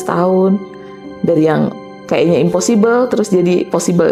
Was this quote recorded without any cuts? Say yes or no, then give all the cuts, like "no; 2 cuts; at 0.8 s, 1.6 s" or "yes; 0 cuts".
yes; 0 cuts